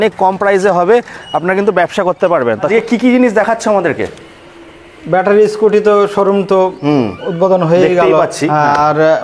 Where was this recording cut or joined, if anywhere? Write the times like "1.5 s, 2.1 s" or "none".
2.7 s